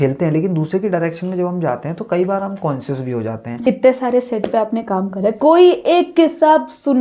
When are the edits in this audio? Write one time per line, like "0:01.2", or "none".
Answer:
0:03.6